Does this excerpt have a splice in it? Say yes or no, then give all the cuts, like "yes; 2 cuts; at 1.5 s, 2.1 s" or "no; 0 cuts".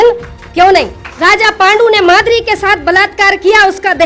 yes; 1 cut; at 1.0 s